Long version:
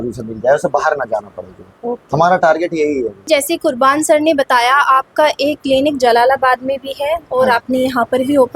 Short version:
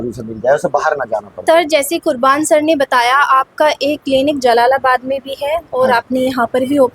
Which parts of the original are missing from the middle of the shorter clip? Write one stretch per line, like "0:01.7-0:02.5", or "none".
0:01.6-0:03.2